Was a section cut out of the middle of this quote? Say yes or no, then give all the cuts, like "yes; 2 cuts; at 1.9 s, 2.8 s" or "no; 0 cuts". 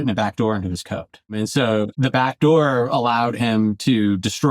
yes; 1 cut; at 1.6 s